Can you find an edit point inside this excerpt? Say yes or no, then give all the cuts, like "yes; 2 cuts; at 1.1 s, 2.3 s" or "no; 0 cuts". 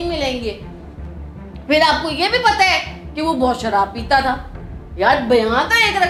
no; 0 cuts